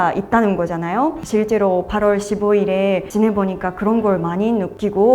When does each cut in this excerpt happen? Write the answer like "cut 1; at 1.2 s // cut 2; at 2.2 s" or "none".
cut 1; at 1.2 s